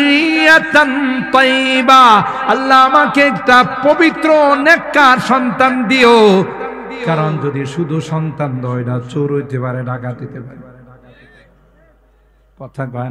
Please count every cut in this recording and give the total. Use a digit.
0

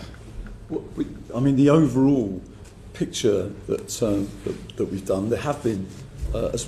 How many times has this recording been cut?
0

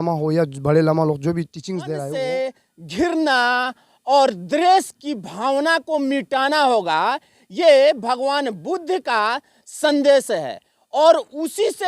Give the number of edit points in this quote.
1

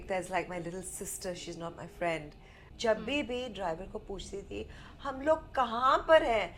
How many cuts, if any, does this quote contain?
1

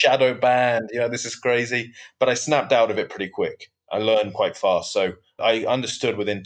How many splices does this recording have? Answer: 2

